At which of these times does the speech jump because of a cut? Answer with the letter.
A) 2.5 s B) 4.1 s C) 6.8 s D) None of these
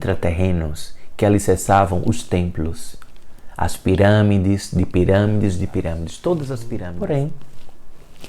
C